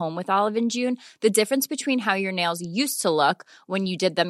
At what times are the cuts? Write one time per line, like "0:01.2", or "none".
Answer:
none